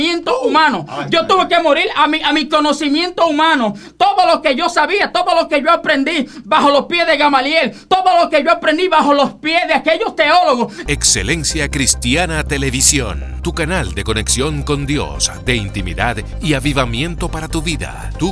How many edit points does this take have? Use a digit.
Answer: 1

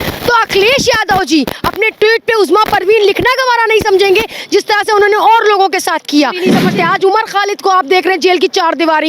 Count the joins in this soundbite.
1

